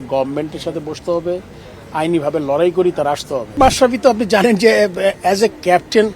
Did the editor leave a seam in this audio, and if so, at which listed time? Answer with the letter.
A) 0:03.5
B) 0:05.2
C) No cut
A